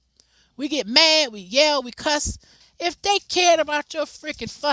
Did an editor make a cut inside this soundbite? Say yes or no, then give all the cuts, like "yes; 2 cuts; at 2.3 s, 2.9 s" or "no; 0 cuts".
yes; 1 cut; at 2.6 s